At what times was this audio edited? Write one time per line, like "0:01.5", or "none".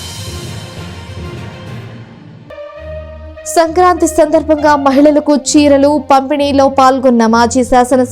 0:02.3